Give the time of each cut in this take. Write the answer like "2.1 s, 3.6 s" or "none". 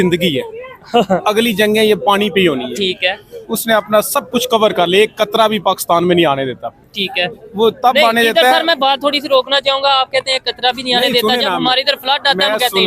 none

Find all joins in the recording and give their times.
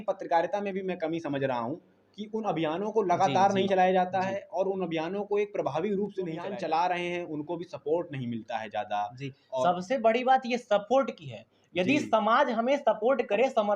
6.4 s

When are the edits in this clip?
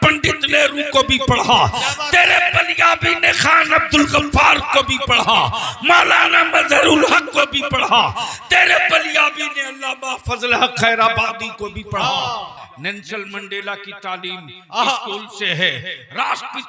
12.6 s

